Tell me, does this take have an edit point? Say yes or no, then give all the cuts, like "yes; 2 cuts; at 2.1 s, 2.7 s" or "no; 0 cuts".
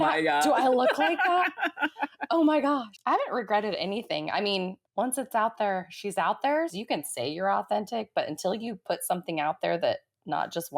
yes; 3 cuts; at 2.9 s, 4.8 s, 6.8 s